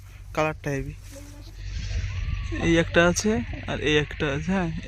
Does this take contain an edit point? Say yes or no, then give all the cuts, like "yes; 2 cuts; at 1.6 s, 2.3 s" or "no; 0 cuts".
yes; 1 cut; at 1.3 s